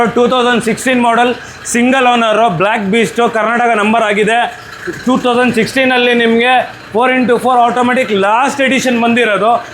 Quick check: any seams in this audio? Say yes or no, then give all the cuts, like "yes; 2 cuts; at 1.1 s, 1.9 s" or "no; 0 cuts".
no; 0 cuts